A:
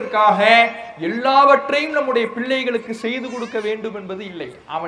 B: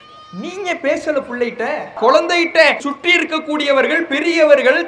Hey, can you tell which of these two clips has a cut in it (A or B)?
B